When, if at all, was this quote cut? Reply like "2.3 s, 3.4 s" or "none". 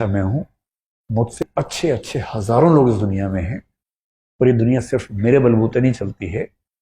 1.4 s